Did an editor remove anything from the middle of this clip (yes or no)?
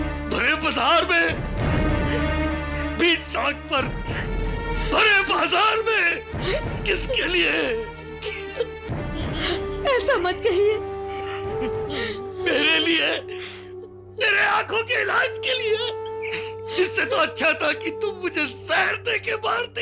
no